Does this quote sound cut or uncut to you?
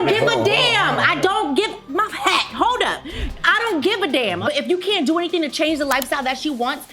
cut